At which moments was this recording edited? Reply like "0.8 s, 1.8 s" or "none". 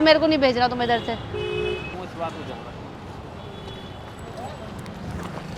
1.9 s

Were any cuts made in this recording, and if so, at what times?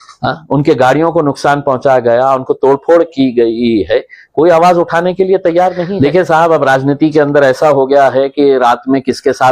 5.9 s

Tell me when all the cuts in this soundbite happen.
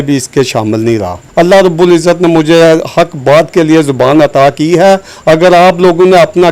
1.2 s

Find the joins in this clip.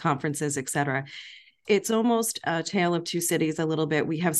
none

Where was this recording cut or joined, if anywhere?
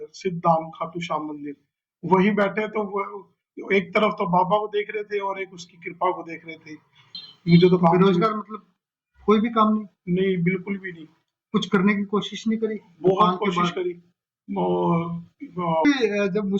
7.1 s, 15.8 s

